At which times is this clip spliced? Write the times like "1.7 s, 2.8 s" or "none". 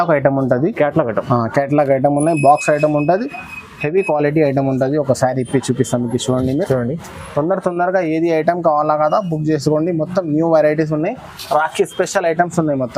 none